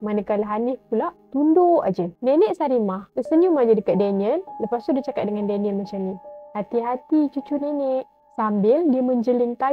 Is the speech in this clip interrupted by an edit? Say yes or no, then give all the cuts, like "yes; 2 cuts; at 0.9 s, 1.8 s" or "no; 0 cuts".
yes; 1 cut; at 2.1 s